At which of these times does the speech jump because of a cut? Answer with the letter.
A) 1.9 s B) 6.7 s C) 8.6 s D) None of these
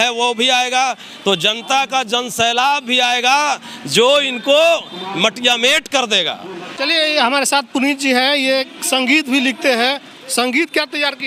D